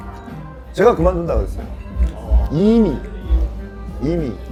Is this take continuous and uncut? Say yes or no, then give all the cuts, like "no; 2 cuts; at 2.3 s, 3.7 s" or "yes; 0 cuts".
yes; 0 cuts